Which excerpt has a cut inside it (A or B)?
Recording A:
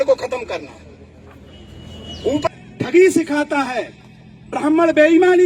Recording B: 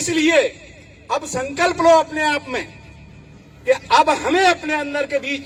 A